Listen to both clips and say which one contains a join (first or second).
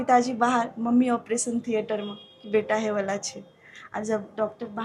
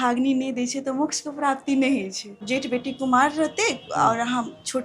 second